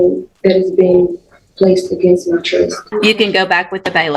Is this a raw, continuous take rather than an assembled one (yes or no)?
no